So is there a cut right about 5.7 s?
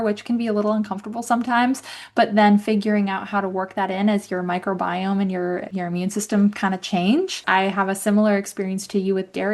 yes; 2 cuts; at 5.7 s, 7.4 s

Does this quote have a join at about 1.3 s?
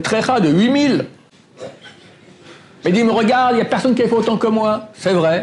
no; 0 cuts

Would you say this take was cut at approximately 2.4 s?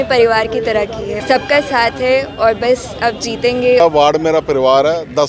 no; 2 cuts; at 1.2 s, 3.8 s

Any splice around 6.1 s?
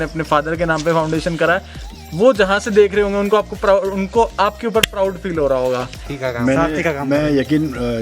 yes; 1 cut; at 6.1 s

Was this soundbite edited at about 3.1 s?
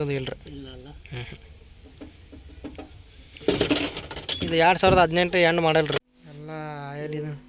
no; 1 cut; at 6.2 s

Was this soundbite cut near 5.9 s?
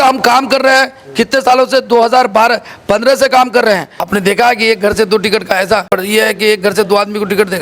yes; 2 cuts; at 4.1 s, 5.9 s

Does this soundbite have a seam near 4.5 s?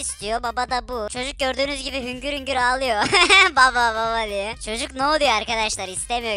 yes; 2 cuts; at 1.1 s, 4.5 s

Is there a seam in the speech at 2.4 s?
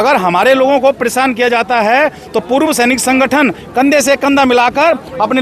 no; 0 cuts

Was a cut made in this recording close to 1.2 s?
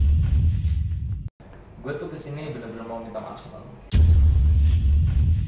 yes; 1 cut; at 1.2 s

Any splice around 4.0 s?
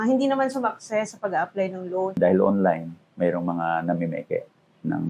no; 1 cut; at 2.2 s

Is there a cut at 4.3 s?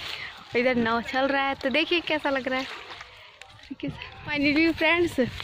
yes; 1 cut; at 4.3 s

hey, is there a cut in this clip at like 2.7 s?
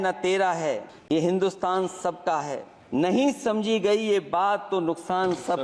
yes; 2 cuts; at 0.9 s, 2.7 s

